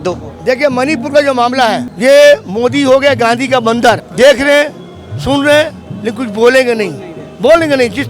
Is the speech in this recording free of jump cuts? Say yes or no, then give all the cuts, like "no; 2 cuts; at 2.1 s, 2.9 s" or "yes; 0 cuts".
no; 2 cuts; at 1.9 s, 4.1 s